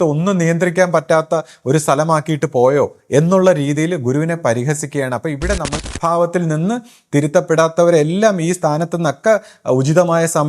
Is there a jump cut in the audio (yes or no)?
yes